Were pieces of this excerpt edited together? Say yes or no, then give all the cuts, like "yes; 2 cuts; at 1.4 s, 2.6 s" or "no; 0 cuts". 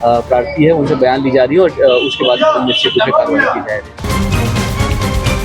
yes; 1 cut; at 4.0 s